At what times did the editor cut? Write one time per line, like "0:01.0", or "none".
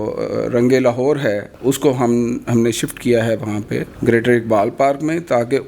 0:01.5
0:03.8